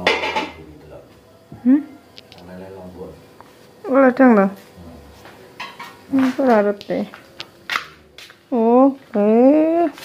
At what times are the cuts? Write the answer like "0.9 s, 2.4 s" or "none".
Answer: none